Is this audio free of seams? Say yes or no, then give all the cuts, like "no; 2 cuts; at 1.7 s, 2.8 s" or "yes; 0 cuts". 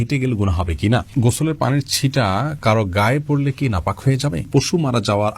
no; 2 cuts; at 1.1 s, 4.5 s